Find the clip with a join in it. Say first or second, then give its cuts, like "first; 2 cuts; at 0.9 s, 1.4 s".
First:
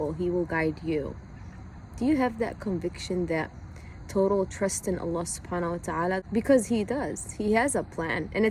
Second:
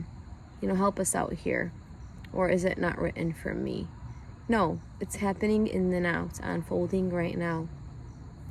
first; 1 cut; at 6.2 s